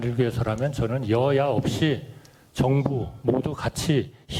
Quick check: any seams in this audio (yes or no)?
no